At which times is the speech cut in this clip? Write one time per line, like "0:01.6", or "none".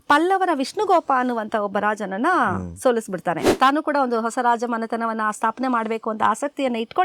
0:03.5